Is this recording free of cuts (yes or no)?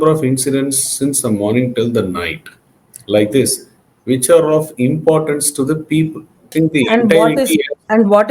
no